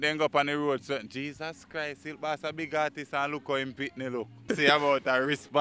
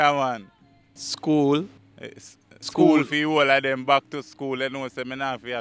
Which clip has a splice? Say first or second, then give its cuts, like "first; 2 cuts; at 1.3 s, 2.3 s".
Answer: first; 1 cut; at 4.5 s